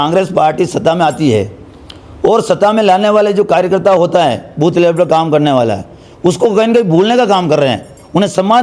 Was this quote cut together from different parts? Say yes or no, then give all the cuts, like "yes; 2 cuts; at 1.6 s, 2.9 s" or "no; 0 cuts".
no; 0 cuts